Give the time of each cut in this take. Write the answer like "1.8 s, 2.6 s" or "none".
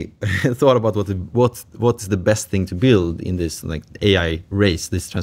none